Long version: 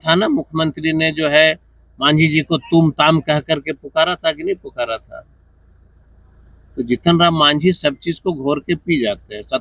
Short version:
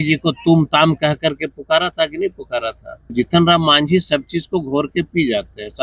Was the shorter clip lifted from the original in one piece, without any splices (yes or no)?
no